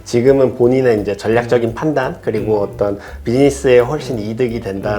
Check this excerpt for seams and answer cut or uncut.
uncut